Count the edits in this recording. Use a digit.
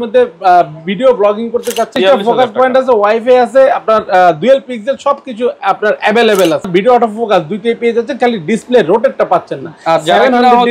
2